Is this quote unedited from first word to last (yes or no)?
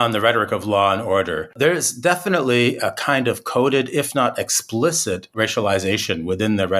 yes